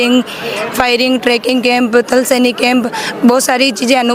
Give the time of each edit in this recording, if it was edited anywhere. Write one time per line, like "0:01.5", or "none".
none

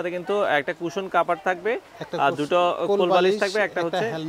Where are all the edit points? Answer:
none

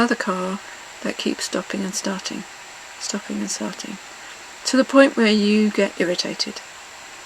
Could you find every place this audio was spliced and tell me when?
none

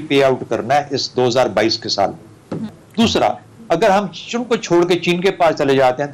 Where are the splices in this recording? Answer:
none

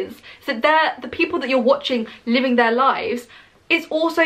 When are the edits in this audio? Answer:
none

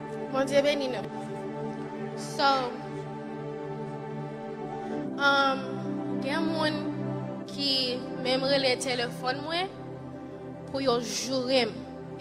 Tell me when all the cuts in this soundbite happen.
0:01.0

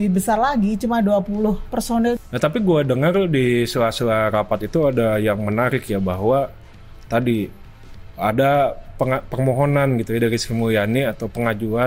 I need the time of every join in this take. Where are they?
0:02.2

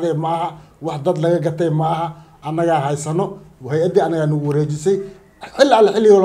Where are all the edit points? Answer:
none

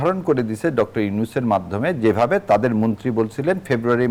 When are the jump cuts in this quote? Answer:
none

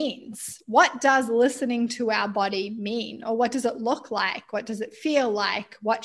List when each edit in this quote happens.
none

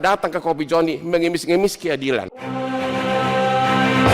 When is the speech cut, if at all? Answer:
0:02.4

